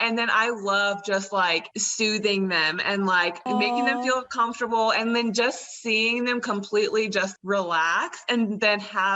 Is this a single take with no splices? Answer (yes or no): no